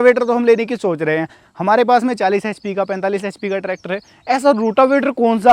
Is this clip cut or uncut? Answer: uncut